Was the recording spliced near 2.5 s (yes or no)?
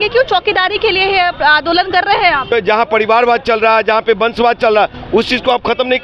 yes